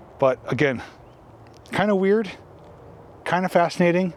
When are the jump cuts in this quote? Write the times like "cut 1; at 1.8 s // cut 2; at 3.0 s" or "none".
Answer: none

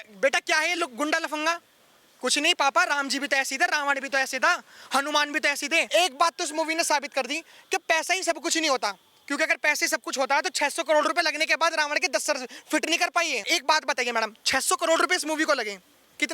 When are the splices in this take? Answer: cut 1; at 5.9 s // cut 2; at 13.5 s

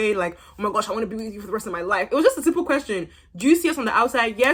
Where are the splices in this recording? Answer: none

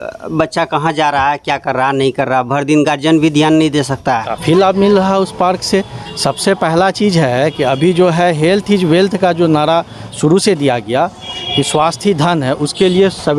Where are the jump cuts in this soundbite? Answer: none

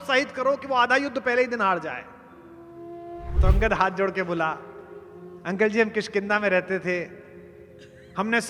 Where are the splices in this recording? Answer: cut 1; at 3.4 s

